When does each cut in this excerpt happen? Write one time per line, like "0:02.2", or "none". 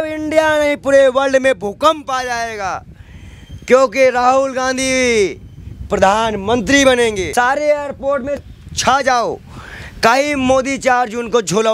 0:07.3
0:08.5